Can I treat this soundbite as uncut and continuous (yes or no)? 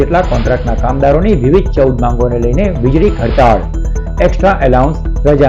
yes